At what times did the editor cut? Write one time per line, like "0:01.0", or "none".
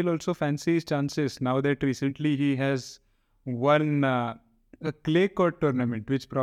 none